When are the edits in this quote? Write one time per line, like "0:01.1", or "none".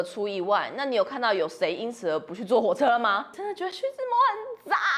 0:03.3